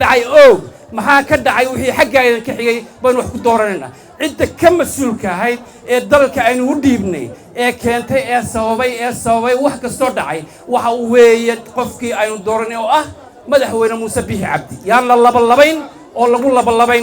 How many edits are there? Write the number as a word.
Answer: zero